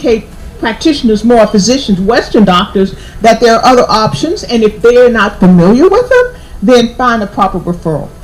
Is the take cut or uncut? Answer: uncut